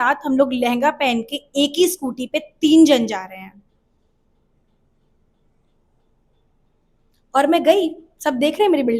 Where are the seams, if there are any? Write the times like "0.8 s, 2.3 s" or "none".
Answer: none